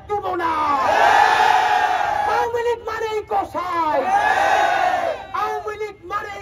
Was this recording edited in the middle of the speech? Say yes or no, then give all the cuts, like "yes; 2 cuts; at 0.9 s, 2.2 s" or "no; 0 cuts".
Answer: yes; 1 cut; at 2.4 s